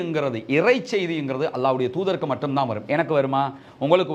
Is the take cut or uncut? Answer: uncut